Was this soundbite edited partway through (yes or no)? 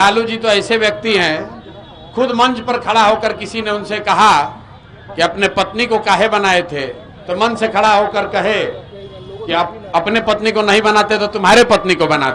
no